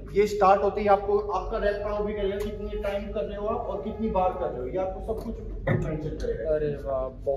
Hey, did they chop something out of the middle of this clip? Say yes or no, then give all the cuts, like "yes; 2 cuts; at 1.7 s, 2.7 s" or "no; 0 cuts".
no; 0 cuts